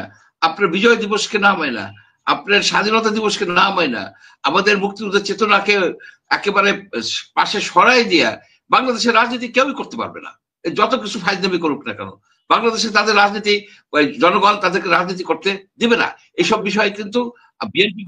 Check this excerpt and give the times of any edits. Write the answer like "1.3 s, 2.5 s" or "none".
none